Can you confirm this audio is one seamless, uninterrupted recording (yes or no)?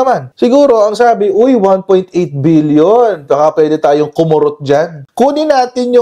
yes